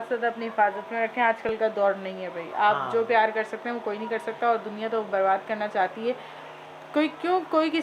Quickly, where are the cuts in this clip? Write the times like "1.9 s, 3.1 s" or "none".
none